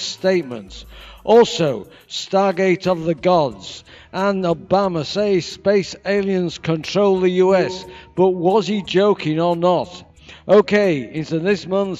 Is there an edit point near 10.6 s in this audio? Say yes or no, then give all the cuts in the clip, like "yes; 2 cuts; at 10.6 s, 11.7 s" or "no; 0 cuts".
no; 1 cut; at 8.8 s